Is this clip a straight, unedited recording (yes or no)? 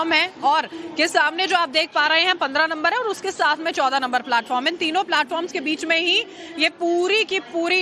yes